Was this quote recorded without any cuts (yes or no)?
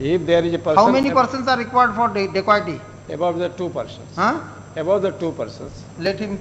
yes